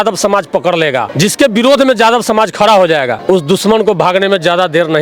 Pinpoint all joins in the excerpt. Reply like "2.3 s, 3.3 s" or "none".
1.1 s, 3.1 s